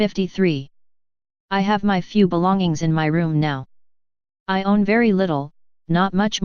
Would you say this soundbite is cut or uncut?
cut